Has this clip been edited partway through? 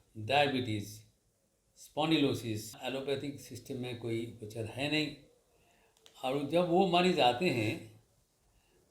yes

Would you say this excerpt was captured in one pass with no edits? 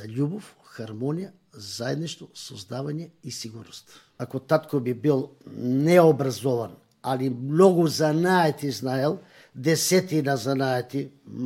no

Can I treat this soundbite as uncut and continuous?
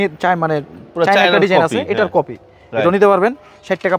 yes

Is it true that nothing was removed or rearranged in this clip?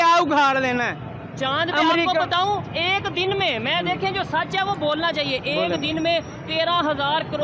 yes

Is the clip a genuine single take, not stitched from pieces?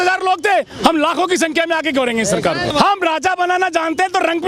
no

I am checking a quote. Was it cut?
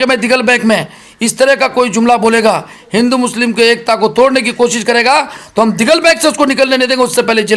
no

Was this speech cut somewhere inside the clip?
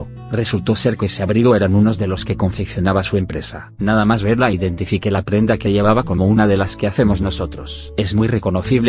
yes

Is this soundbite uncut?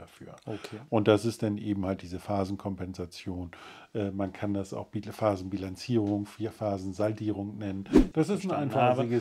no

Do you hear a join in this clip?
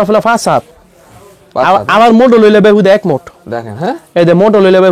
no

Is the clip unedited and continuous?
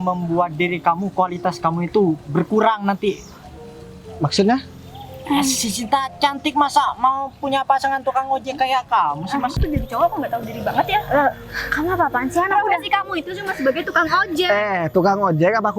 no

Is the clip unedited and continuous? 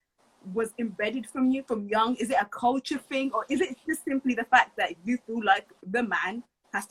yes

